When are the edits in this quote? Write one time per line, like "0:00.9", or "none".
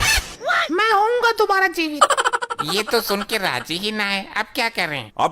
none